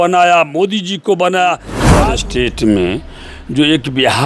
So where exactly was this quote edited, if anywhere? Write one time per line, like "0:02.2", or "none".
0:01.7